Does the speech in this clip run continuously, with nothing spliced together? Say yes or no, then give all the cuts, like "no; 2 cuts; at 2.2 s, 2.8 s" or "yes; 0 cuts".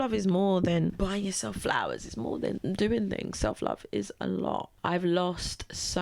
no; 2 cuts; at 1.0 s, 2.6 s